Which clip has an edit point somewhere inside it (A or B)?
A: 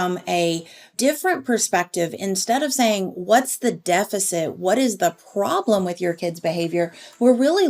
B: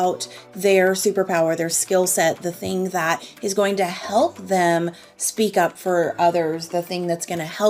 A